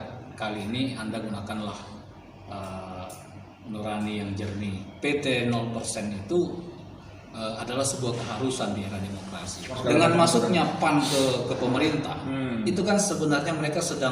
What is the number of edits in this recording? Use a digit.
2